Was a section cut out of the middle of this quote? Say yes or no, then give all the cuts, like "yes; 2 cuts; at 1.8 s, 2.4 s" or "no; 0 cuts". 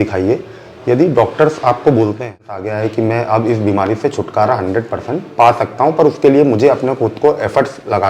yes; 1 cut; at 2.6 s